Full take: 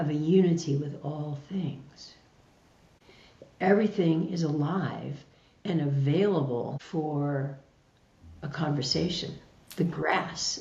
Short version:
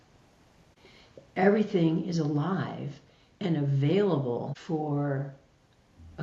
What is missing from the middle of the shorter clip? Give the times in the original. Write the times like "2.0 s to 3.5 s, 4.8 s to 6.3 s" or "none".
none